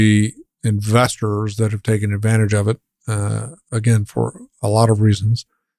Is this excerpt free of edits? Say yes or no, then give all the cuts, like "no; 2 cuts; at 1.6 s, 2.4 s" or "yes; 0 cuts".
yes; 0 cuts